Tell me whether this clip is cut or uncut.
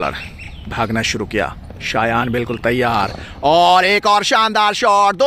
uncut